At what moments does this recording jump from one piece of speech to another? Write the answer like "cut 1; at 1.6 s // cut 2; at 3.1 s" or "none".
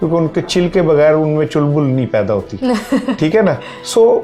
none